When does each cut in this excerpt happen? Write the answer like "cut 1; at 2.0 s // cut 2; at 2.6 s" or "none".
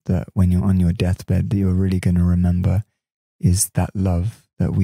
none